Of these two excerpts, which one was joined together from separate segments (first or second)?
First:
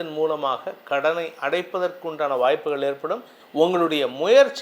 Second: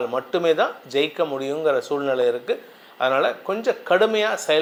first